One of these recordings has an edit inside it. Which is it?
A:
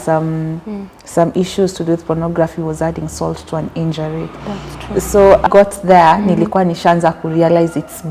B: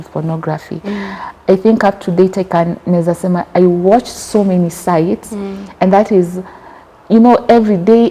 A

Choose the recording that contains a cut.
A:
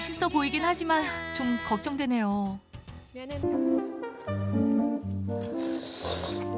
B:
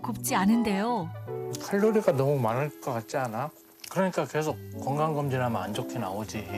A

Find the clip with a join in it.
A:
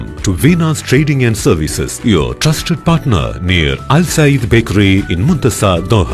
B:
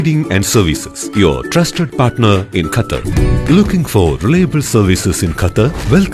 B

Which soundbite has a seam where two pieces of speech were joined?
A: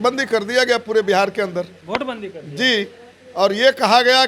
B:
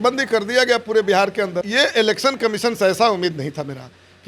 B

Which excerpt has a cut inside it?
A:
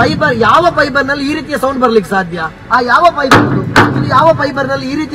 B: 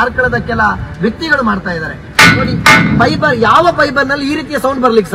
B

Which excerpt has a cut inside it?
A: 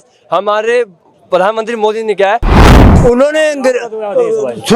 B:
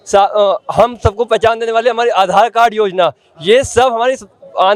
A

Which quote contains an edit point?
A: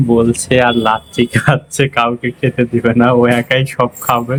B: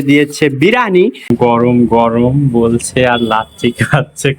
B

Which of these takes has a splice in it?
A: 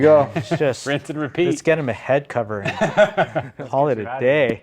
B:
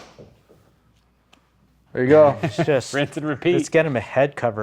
A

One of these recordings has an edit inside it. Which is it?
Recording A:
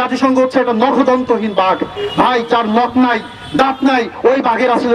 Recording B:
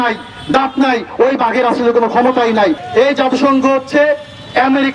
B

